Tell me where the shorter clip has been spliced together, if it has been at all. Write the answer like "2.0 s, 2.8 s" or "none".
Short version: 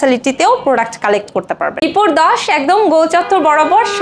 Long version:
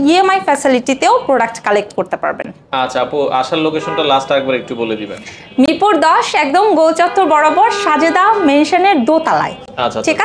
1.8 s